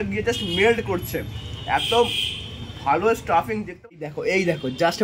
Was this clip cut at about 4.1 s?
yes; 1 cut; at 4.1 s

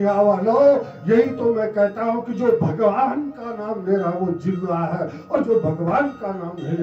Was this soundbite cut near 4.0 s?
no; 0 cuts

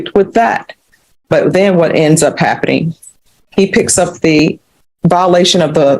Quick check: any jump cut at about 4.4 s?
yes; 1 cut; at 4.4 s

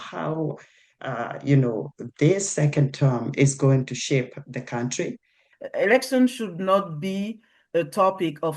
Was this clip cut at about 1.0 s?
no; 1 cut; at 5.5 s

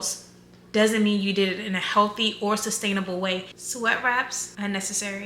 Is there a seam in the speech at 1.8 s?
no; 1 cut; at 3.6 s

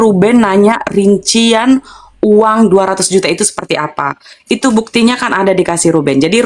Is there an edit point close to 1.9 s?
no; 0 cuts

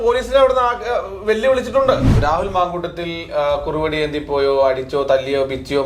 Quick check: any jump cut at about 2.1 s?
yes; 1 cut; at 2.1 s

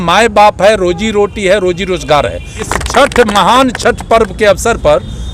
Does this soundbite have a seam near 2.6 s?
yes; 1 cut; at 2.6 s

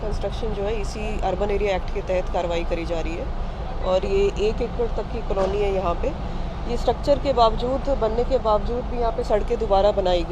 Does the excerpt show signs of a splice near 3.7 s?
no; 0 cuts

